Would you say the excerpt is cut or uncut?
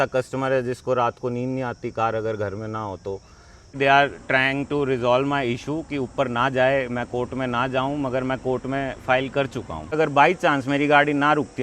cut